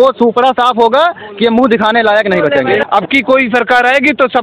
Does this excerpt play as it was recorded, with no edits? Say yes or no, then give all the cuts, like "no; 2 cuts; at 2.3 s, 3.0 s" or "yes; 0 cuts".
no; 1 cut; at 2.8 s